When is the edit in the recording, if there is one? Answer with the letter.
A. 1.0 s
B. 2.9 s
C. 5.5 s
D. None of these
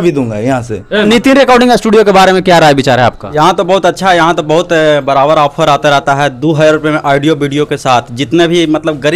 A